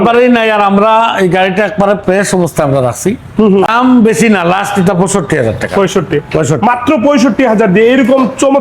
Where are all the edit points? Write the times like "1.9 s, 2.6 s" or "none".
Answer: 3.7 s